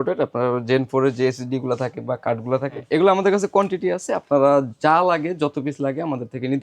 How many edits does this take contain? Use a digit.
1